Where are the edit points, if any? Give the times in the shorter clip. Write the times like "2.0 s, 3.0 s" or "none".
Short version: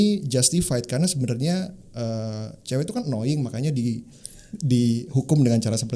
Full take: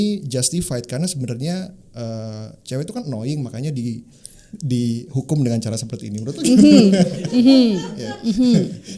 none